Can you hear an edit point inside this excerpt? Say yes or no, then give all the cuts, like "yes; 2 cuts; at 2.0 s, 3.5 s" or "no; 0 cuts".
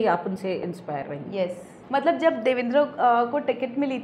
yes; 1 cut; at 1.8 s